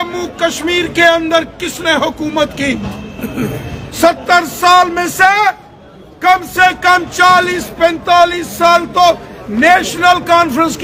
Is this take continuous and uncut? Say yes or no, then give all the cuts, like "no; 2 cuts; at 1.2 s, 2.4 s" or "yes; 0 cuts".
yes; 0 cuts